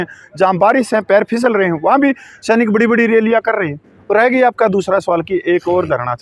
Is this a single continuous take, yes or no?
yes